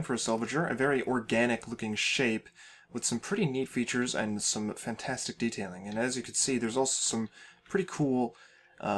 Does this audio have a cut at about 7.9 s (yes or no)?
yes